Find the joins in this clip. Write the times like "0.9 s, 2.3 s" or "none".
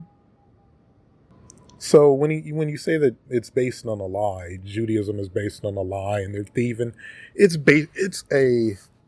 1.3 s